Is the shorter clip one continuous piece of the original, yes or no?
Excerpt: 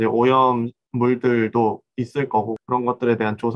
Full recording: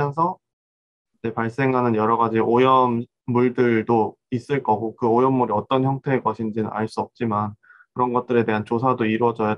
no